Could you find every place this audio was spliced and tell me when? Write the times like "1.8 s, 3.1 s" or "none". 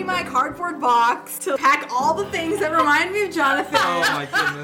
1.5 s